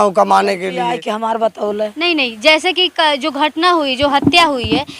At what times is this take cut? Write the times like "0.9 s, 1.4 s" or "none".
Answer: 1.0 s